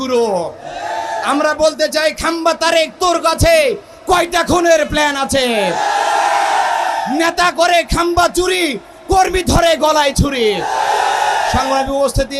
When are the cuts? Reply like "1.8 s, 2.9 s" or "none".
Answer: none